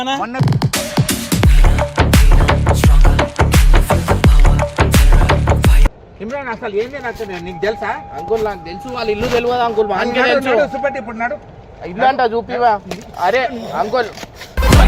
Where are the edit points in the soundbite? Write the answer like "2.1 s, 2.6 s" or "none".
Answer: 5.9 s